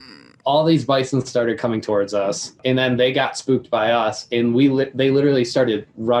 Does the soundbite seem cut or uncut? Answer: uncut